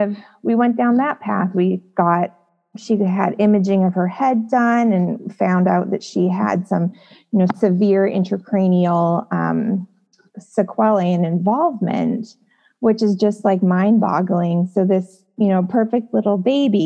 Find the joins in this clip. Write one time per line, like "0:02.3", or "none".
none